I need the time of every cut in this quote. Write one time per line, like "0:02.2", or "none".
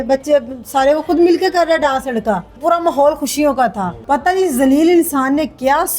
0:02.5
0:03.9